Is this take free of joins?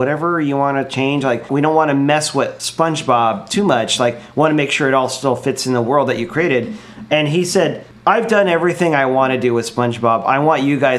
no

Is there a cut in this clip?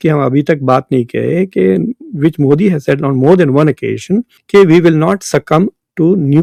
no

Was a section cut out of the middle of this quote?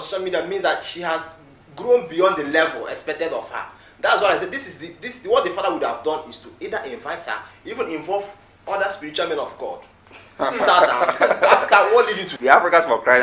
yes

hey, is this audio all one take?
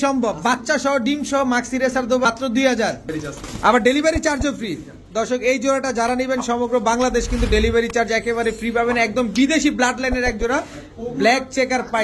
no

